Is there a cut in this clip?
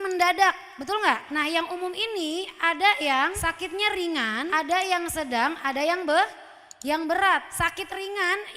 yes; 1 cut; at 1.2 s

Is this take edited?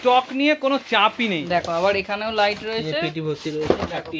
yes; 1 cut; at 1.4 s

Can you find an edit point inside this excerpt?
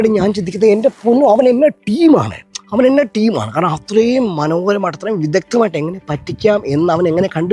no; 0 cuts

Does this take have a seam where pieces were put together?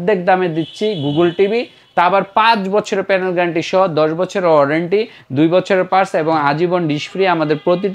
no; 0 cuts

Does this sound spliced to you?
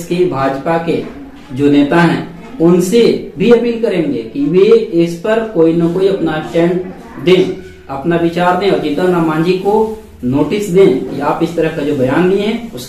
no; 0 cuts

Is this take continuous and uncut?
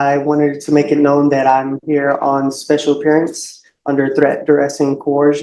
yes; 0 cuts

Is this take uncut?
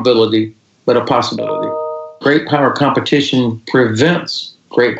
no; 1 cut; at 2.2 s

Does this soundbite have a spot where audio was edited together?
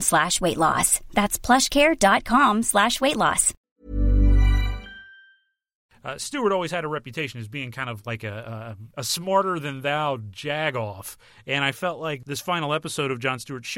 yes; 4 cuts; at 3.5 s, 5.8 s, 8.8 s, 12.2 s

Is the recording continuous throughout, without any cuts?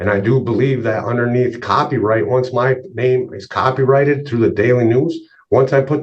yes; 0 cuts

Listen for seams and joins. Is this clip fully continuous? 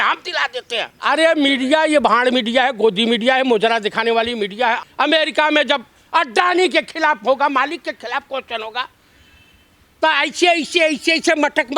no; 2 cuts; at 0.9 s, 4.9 s

